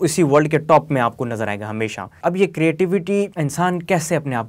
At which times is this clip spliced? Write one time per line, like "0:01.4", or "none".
0:02.1
0:03.3